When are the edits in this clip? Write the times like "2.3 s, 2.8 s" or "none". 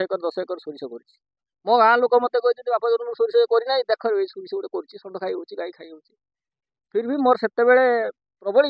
none